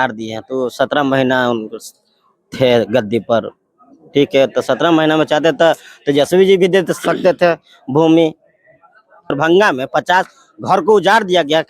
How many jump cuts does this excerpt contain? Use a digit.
1